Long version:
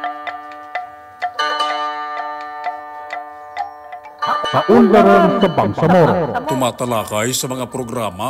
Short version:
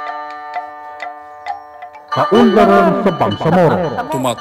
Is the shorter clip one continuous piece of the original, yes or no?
no